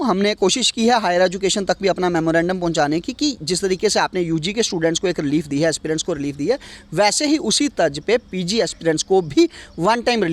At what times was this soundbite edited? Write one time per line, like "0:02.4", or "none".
none